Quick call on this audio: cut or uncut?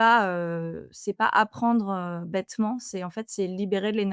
uncut